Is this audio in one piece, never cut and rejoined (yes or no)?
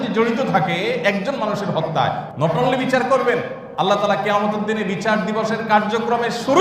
no